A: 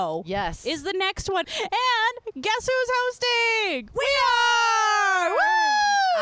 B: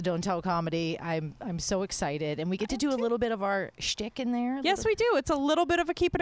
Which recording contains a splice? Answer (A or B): A